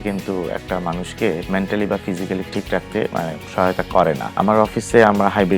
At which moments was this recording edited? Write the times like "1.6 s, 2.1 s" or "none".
1.4 s, 2.5 s, 4.4 s